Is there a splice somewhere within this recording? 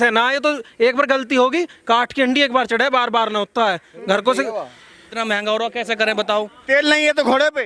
yes; 1 cut; at 5.1 s

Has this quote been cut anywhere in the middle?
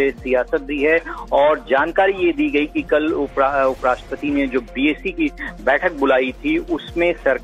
yes; 1 cut; at 2.8 s

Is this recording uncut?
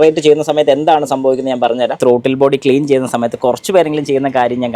no; 1 cut; at 2.0 s

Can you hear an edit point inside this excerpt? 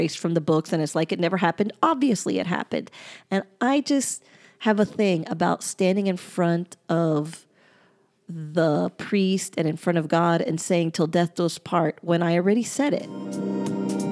yes; 1 cut; at 13.1 s

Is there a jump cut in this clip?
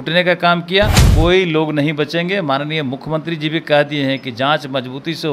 yes; 1 cut; at 1.1 s

